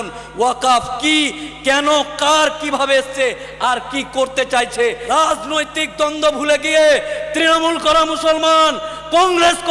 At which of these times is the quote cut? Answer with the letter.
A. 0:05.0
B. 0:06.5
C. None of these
A